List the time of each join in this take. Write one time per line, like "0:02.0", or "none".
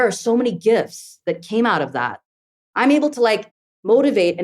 0:02.2